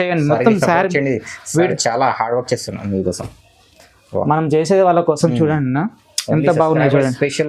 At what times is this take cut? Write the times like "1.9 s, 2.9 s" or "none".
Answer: none